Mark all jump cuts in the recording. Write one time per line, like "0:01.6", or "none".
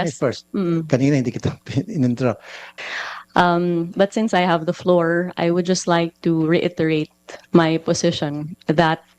0:02.6